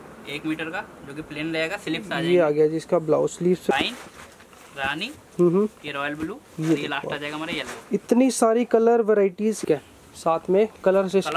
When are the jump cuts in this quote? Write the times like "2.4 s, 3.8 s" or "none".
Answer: 3.7 s, 9.6 s

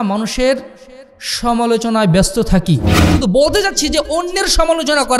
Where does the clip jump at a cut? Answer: 3.0 s

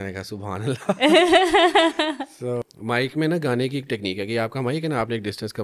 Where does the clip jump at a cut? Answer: 2.6 s

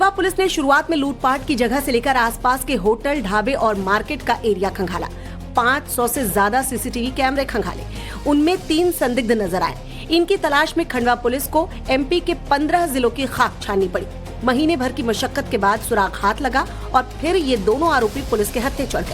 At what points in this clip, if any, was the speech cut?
14.5 s

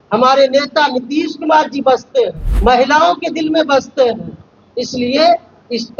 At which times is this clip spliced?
2.4 s

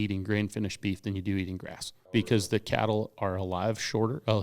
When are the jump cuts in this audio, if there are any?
2.1 s

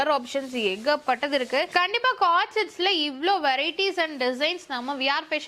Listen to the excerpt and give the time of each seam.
none

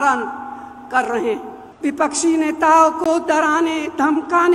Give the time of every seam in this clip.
1.6 s

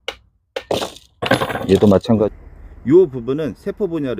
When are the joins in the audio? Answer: 2.3 s

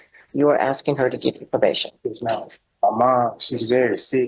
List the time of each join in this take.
2.6 s

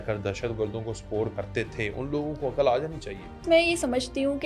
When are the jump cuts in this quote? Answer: 1.3 s, 3.4 s

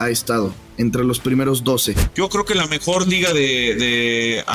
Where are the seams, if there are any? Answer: 2.0 s

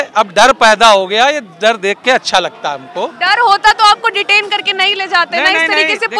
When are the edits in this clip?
none

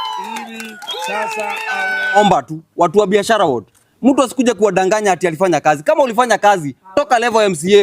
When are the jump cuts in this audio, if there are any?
2.2 s

